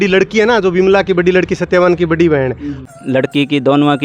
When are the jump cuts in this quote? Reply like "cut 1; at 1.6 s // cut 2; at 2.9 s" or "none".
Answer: cut 1; at 2.8 s